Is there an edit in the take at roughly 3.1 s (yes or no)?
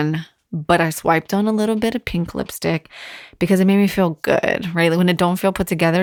no